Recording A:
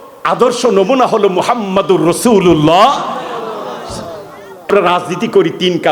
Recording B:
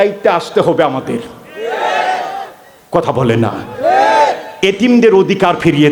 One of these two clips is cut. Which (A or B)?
A